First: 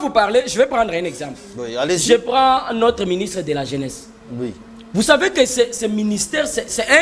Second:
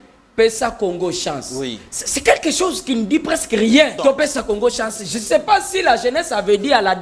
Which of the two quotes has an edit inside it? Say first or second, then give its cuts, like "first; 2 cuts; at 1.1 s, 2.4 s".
second; 1 cut; at 3.9 s